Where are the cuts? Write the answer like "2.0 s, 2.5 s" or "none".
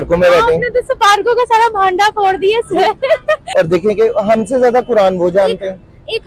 3.4 s